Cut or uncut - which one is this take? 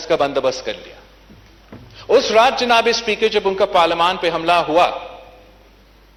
uncut